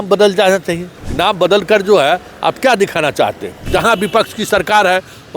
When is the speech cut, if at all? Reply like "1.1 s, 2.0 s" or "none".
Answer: 0.9 s, 3.7 s